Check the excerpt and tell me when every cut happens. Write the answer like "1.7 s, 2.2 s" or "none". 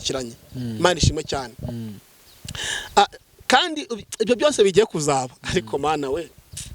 none